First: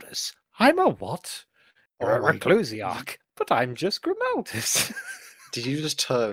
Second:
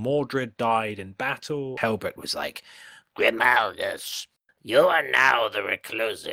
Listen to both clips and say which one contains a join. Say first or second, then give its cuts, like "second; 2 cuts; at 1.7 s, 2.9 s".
second; 1 cut; at 1.8 s